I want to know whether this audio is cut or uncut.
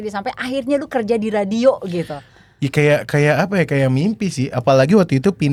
uncut